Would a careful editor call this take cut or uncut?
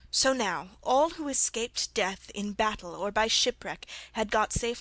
cut